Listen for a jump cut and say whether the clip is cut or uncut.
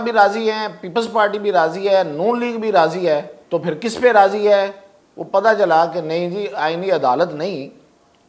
cut